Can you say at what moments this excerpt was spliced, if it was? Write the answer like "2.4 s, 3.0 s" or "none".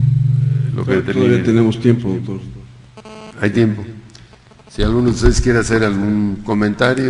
none

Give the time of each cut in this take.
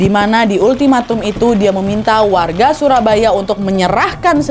none

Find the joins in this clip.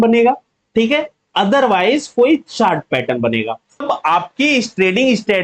3.8 s

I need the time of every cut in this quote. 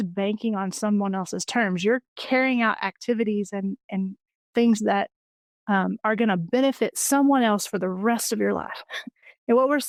none

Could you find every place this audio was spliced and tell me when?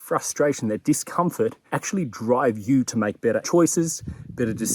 1.7 s, 3.4 s

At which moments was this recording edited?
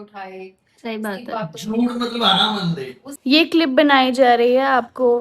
3.0 s

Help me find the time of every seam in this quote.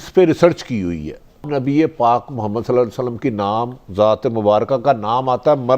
1.5 s

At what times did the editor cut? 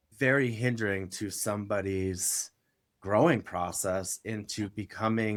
none

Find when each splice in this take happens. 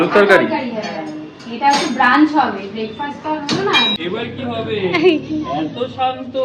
3.9 s

